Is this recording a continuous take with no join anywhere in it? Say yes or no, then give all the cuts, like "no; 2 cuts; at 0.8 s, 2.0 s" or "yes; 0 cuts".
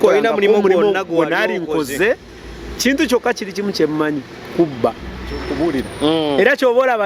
no; 1 cut; at 5.5 s